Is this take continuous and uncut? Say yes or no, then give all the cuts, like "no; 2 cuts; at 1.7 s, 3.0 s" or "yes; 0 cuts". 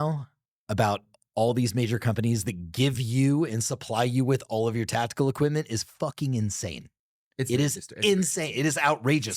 yes; 0 cuts